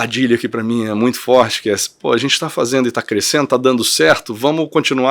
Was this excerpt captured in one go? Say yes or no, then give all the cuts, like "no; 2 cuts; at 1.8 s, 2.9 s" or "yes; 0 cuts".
yes; 0 cuts